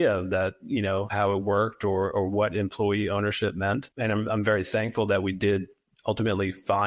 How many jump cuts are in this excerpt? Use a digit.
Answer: 2